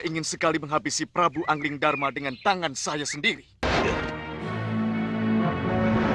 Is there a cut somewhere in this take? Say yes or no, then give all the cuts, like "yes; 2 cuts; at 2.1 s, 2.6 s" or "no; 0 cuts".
yes; 1 cut; at 3.6 s